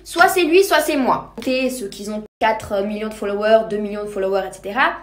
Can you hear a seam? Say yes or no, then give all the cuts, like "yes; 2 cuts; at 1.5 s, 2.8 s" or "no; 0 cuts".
yes; 1 cut; at 1.3 s